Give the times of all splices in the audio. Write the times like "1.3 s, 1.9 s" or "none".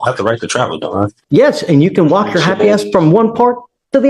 1.2 s